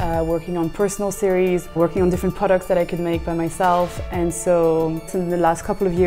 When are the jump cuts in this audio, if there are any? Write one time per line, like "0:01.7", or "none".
0:01.8
0:05.2